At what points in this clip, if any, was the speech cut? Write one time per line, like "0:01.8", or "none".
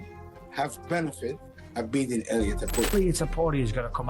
0:02.9